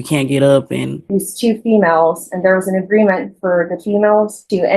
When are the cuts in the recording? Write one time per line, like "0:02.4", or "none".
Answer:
0:01.0